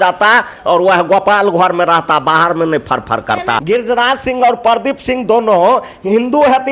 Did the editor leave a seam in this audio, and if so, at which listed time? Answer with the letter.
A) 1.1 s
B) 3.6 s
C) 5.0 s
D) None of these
B